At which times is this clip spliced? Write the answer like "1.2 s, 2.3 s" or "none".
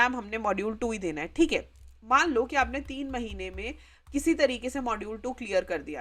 none